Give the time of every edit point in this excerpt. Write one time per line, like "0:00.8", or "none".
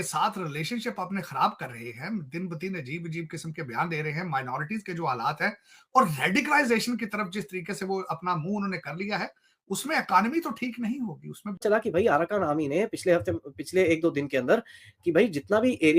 0:11.6